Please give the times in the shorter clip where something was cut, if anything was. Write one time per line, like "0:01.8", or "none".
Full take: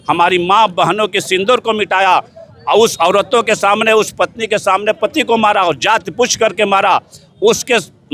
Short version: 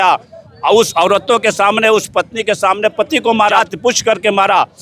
0:03.5